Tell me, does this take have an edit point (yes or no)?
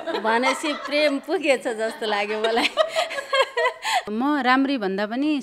yes